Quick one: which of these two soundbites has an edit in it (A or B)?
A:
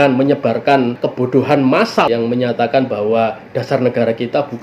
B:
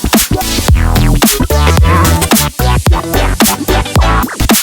A